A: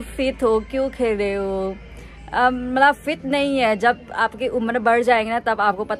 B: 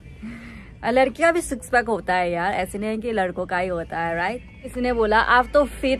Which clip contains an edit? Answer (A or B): B